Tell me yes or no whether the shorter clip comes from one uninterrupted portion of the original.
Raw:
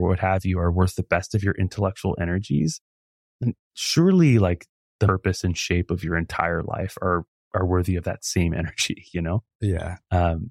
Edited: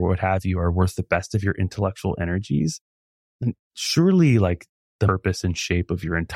yes